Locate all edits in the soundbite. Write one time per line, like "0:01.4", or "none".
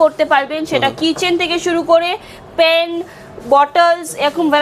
none

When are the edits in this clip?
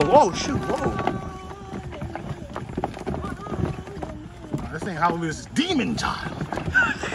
none

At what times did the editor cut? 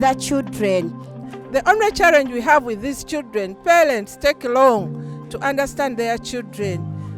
0:01.1

